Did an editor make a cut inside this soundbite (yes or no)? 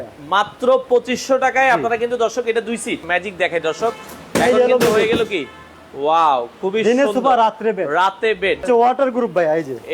yes